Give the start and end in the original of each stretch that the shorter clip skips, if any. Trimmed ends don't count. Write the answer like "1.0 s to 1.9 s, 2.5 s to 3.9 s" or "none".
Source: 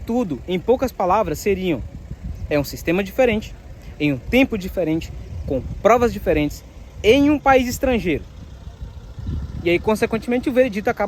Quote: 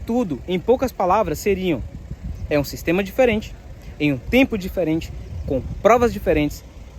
none